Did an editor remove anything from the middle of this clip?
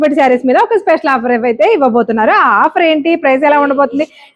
no; 0 cuts

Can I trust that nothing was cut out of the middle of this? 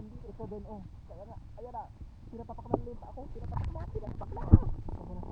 yes; 0 cuts

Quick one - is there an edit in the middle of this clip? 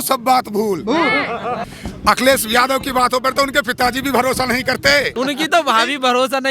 yes; 2 cuts; at 1.7 s, 5.1 s

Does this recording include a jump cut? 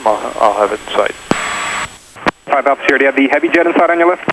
yes; 1 cut; at 2.2 s

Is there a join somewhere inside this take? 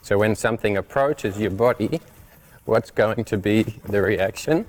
no; 0 cuts

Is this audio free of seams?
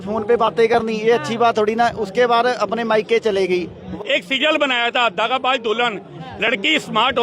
no; 1 cut; at 3.9 s

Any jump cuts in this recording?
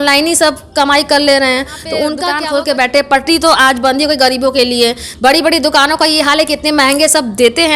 yes; 1 cut; at 2.2 s

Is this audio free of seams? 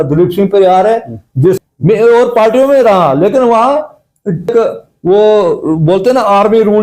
no; 2 cuts; at 1.6 s, 4.5 s

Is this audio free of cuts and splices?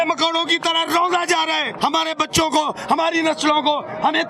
no; 1 cut; at 1.7 s

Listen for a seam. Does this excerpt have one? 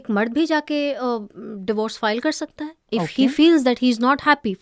no; 0 cuts

